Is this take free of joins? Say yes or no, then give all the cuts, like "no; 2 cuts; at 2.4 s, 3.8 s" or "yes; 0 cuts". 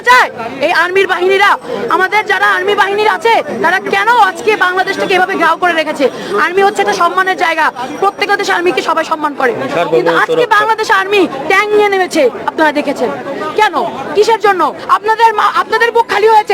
no; 1 cut; at 14.8 s